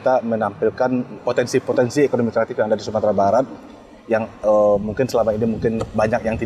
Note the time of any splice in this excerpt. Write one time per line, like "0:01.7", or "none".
0:01.1